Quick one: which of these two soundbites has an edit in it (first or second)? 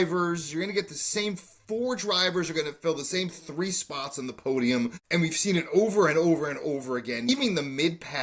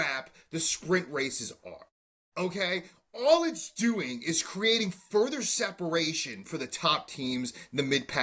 first